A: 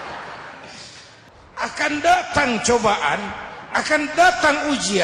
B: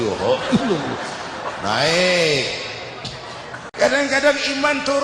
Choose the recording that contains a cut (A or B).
A